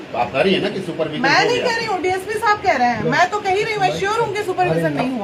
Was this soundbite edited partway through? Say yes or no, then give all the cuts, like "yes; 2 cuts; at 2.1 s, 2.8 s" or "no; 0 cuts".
no; 0 cuts